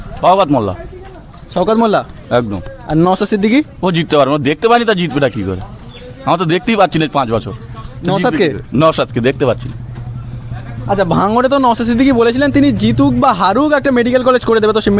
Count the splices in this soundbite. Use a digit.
0